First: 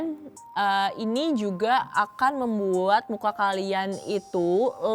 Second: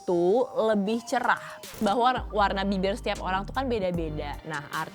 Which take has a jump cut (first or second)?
second